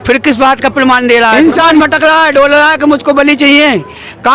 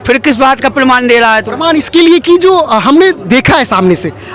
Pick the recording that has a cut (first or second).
first